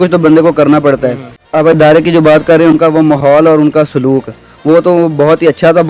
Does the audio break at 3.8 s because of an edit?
no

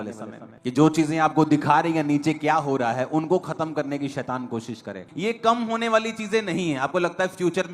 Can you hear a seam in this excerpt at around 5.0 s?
yes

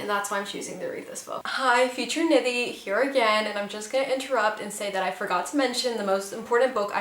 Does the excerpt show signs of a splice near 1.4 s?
no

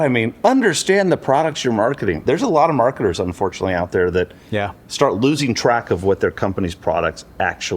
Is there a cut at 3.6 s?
no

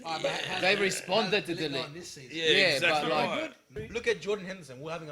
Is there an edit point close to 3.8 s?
yes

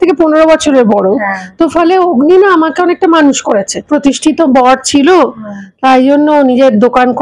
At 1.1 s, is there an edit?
no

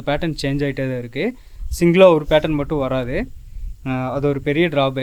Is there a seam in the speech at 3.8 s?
no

